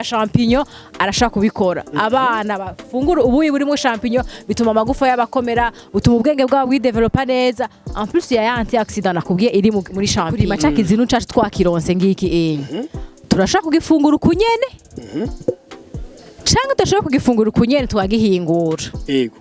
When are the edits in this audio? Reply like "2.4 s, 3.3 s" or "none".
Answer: 10.6 s